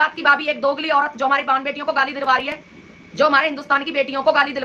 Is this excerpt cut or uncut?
uncut